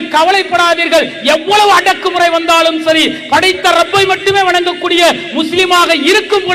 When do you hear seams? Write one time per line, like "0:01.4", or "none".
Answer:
none